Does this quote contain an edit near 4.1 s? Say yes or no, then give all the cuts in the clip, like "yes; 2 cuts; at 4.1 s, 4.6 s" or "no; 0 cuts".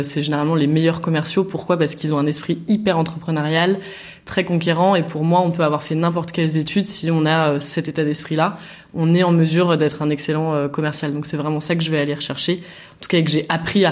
no; 0 cuts